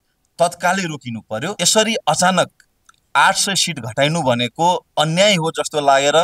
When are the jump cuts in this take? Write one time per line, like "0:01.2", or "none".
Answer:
0:01.6